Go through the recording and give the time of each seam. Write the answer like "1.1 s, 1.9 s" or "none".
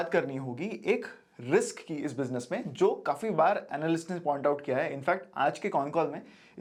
none